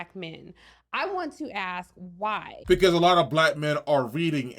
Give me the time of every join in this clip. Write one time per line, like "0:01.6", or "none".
0:02.7